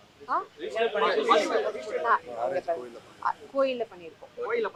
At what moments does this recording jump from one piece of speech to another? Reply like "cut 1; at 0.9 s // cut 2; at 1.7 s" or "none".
none